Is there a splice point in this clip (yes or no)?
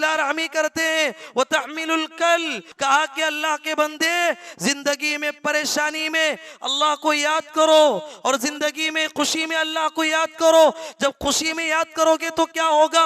yes